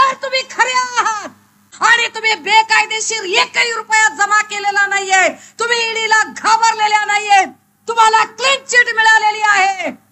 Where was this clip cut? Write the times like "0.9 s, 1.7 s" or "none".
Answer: 1.7 s